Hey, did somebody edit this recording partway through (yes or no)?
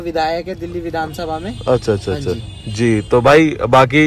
no